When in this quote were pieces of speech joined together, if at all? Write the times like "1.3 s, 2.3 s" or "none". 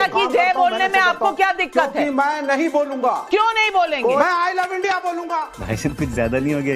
4.2 s